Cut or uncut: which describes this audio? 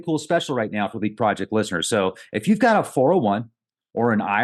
uncut